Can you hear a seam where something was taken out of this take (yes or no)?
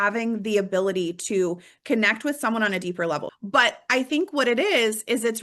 yes